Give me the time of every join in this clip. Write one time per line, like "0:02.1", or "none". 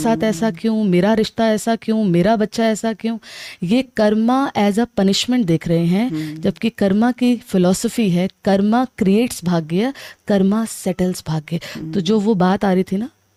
none